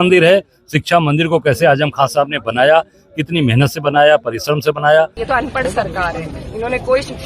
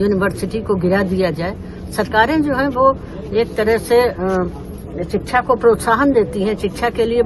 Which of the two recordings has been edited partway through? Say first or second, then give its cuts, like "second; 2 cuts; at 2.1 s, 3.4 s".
first; 1 cut; at 5.2 s